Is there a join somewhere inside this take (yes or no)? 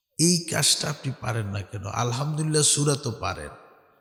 no